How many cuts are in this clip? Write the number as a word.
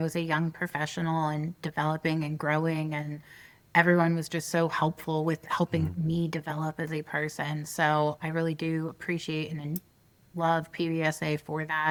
zero